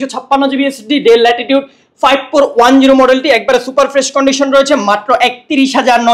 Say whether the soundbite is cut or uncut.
uncut